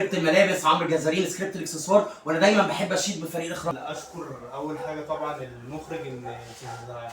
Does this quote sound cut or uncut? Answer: cut